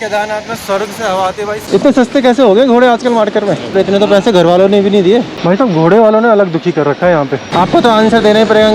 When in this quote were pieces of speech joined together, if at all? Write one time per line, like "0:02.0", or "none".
0:01.6
0:03.7
0:05.3
0:07.4